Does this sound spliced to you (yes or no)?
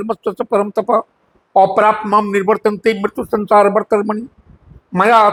no